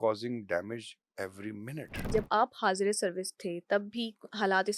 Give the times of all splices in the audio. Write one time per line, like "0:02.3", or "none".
0:01.9